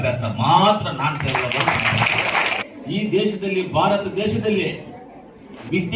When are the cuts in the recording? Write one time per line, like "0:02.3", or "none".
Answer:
0:02.6